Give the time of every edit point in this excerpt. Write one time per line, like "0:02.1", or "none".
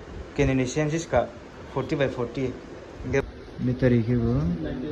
0:03.2